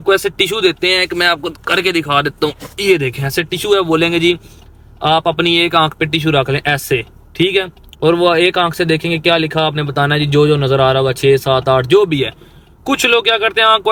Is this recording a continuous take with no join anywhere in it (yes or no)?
yes